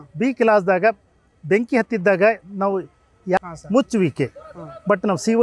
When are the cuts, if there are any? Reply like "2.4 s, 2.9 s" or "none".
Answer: 3.4 s